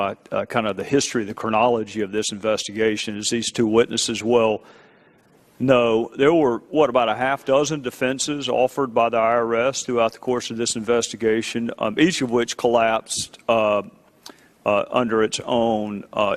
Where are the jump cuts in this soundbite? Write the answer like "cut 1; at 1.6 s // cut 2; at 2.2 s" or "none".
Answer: none